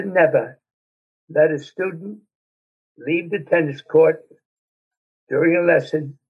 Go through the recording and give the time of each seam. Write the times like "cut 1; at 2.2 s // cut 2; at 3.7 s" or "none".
none